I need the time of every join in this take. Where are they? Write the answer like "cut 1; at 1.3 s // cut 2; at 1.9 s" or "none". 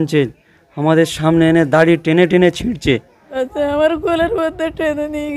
cut 1; at 3.3 s